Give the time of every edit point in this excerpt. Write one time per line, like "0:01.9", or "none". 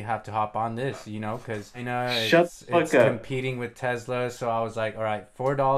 0:01.8